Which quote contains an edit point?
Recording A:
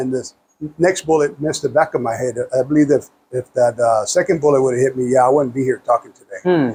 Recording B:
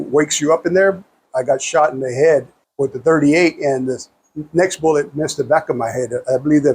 B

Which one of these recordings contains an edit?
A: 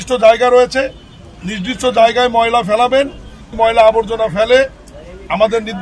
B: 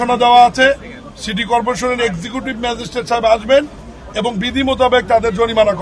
A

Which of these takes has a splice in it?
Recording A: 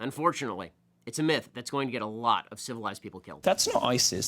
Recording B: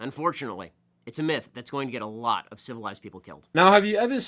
A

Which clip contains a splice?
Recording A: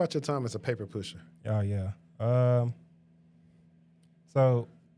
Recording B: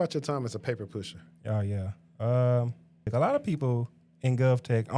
B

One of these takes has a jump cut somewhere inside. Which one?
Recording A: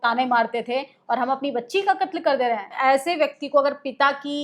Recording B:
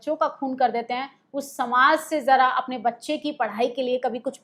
A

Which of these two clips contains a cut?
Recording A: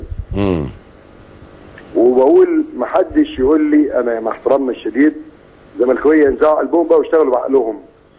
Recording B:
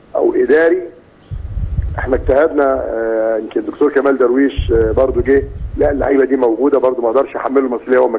A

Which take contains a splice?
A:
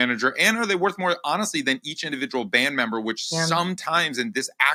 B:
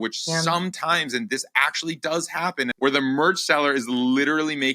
B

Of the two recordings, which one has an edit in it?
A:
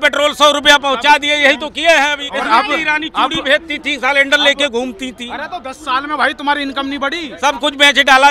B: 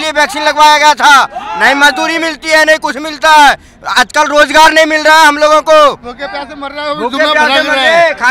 A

